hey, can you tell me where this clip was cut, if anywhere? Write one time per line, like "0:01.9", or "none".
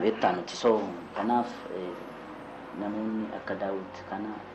none